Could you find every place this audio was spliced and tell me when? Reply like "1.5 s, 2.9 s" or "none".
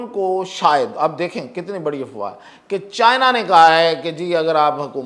none